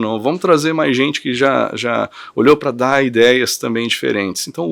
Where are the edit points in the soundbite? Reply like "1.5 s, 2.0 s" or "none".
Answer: none

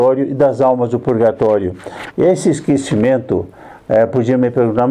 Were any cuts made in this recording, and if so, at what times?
none

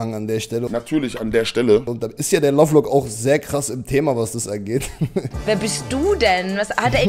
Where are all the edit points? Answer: 5.3 s

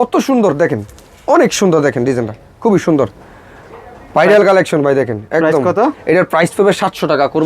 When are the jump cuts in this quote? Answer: none

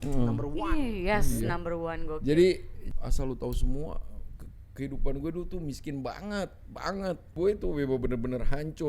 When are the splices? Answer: 2.7 s, 7.3 s

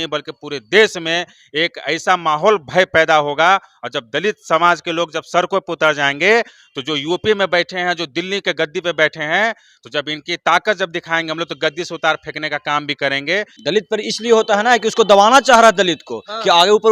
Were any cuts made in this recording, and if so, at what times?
13.5 s

